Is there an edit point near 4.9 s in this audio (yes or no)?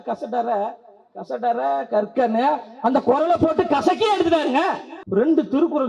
yes